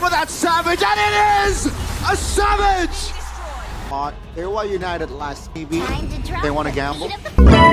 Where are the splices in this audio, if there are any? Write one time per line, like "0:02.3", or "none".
none